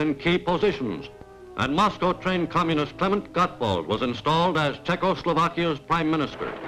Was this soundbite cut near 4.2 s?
yes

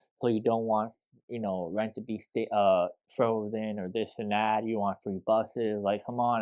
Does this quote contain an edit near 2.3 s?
no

